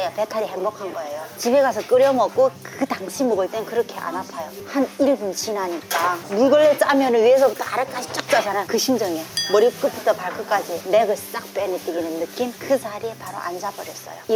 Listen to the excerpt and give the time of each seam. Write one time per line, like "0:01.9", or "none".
0:06.1
0:12.6